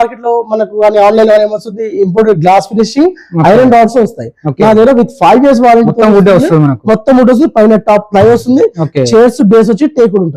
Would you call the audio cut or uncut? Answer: uncut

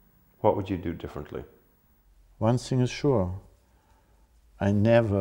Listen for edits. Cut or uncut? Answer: cut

